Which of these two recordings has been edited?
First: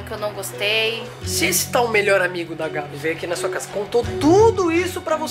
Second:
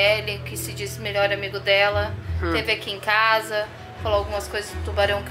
first; 2 cuts; at 1.2 s, 2.9 s

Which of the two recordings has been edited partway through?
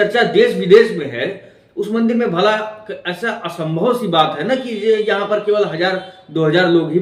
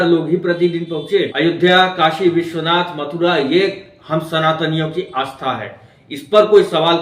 second; 1 cut; at 1.3 s

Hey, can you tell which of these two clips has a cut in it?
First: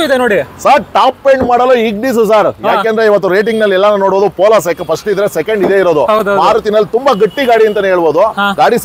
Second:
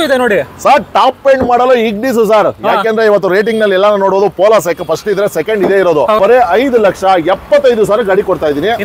second; 1 cut; at 6.2 s

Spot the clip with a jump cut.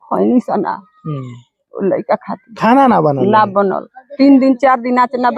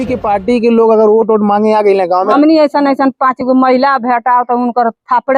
second; 1 cut; at 2.3 s

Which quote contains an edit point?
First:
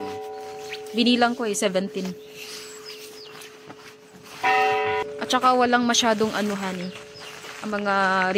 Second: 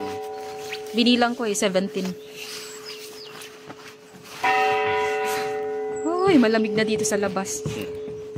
first; 1 cut; at 5.0 s

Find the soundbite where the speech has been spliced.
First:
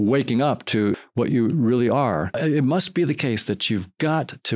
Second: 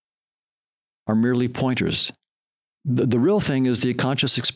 first; 2 cuts; at 1.0 s, 2.3 s

